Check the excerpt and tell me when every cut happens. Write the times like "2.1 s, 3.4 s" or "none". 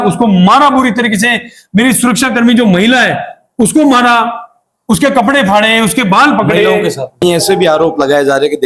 7.2 s